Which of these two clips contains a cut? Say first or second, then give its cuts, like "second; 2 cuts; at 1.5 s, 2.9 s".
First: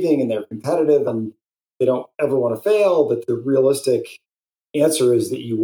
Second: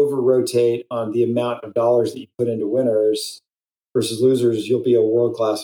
first; 2 cuts; at 1.1 s, 3.2 s